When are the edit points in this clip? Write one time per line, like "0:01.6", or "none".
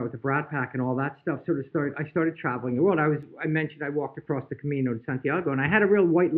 none

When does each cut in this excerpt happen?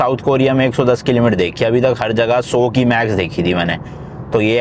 none

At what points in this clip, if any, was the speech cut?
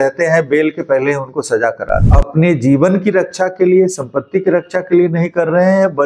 0:02.1

